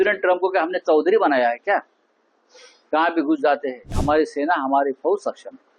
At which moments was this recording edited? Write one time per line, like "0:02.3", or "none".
0:04.0